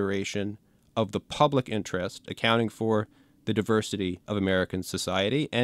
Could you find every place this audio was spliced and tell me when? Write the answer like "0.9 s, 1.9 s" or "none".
4.2 s